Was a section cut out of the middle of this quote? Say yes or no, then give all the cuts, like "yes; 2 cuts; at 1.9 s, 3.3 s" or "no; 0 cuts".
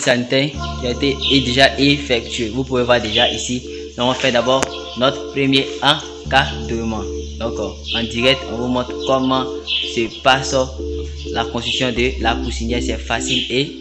no; 0 cuts